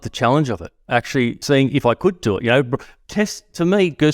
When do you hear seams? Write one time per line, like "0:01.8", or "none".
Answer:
0:01.4